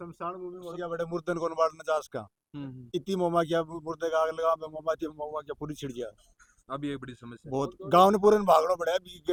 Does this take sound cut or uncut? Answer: uncut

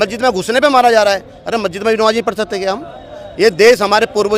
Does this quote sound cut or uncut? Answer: uncut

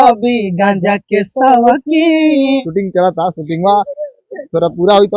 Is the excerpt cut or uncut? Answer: cut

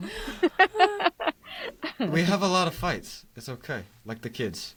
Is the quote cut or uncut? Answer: uncut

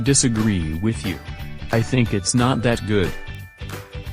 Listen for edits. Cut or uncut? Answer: cut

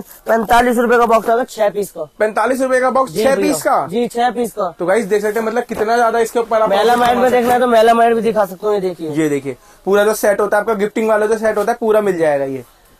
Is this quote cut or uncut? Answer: uncut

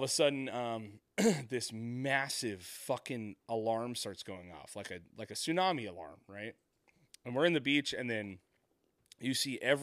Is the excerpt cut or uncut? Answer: uncut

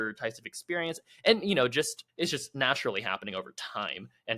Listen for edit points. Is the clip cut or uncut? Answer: cut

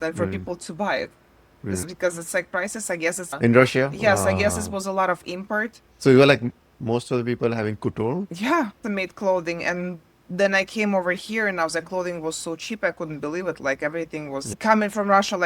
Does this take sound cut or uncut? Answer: uncut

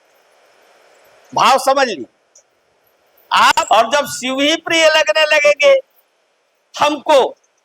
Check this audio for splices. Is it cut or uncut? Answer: cut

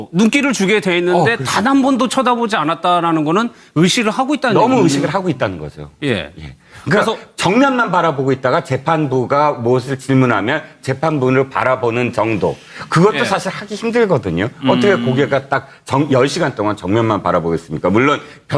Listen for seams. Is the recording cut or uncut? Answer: uncut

